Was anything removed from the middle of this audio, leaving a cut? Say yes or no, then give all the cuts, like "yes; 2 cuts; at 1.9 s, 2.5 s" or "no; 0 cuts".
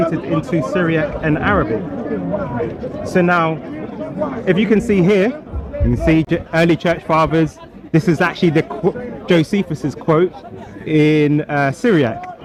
no; 0 cuts